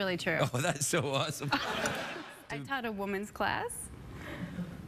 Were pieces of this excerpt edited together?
yes; 1 cut; at 2.2 s

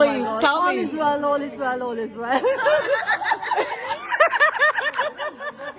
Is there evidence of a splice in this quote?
no; 0 cuts

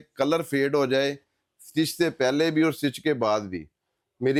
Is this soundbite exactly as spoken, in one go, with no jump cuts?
yes; 0 cuts

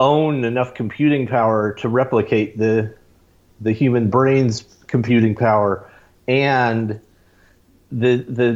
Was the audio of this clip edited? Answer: no; 0 cuts

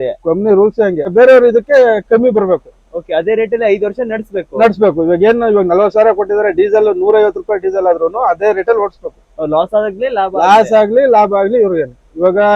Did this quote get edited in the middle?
yes; 1 cut; at 1.1 s

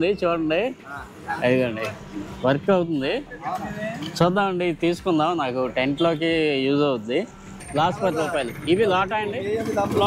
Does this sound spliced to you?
yes; 1 cut; at 7.6 s

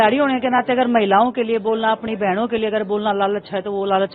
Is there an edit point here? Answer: no; 0 cuts

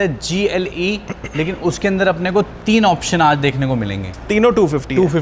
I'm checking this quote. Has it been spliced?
yes; 1 cut; at 4.1 s

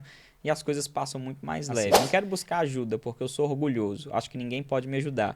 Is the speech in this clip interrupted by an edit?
yes; 1 cut; at 2.1 s

